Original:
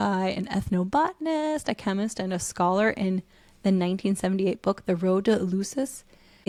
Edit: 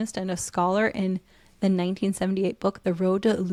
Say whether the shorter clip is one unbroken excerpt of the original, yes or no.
yes